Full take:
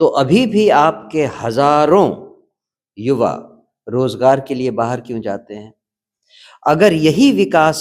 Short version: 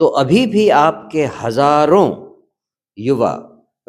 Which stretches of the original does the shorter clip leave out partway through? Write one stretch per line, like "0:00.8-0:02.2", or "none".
none

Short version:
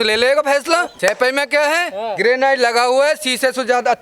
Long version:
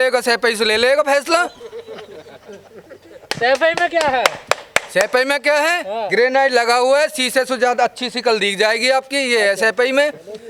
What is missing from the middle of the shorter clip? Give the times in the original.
0:01.5-0:04.9

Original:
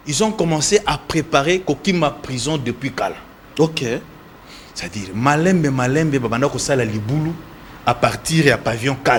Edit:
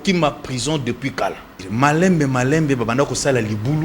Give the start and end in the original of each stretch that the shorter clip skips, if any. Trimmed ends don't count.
0:03.3-0:05.0

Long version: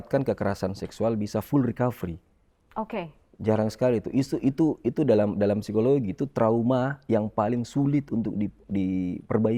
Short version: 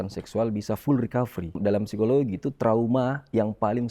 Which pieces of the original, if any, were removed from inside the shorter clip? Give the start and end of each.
0:02.2-0:05.3

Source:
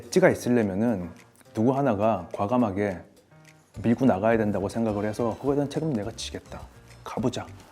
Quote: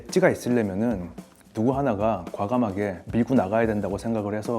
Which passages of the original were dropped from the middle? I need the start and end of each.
0:03.0-0:03.7

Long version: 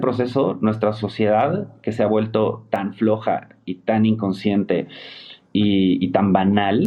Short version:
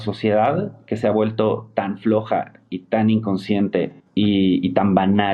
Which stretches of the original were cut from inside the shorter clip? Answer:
0:05.0-0:05.4

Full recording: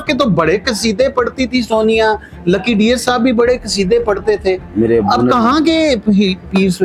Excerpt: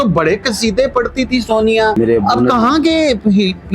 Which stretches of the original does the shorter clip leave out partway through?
0:02.2-0:04.8

